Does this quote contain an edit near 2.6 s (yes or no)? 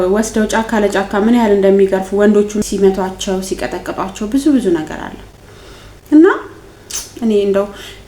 yes